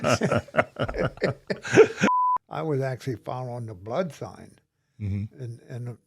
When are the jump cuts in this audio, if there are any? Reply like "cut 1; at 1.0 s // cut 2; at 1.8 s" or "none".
cut 1; at 2.2 s